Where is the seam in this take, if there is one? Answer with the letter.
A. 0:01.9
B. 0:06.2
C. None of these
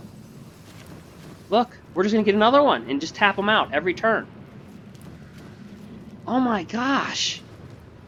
C